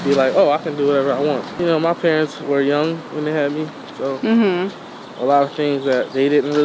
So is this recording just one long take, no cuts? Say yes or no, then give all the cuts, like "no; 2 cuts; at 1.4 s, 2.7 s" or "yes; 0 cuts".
no; 1 cut; at 1.5 s